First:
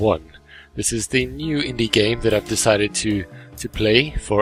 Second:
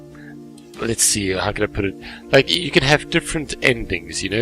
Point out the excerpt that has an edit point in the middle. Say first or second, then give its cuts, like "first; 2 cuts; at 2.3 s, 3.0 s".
second; 1 cut; at 2.6 s